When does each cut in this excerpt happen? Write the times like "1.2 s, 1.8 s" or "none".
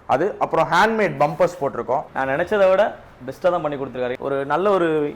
2.1 s, 4.2 s